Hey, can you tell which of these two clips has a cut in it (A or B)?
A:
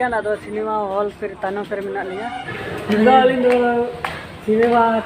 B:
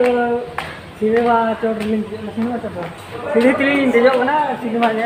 A